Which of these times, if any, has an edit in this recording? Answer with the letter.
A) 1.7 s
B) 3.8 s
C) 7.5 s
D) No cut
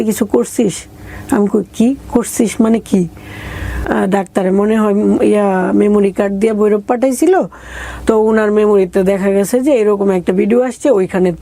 B